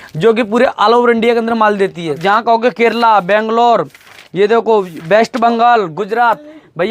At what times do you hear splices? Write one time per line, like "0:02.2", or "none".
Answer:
0:02.2